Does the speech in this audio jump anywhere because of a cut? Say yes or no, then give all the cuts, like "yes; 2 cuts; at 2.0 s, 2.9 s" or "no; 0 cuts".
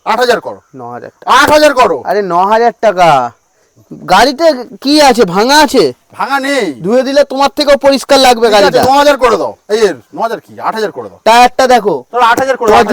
no; 0 cuts